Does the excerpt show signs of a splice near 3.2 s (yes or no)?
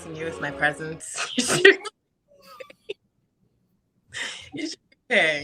no